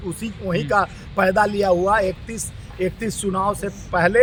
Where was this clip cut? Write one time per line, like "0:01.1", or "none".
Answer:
none